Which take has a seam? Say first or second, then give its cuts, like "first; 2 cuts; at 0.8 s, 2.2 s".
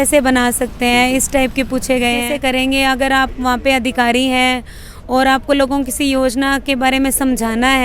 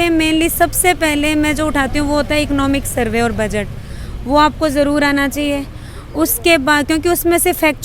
first; 1 cut; at 2.3 s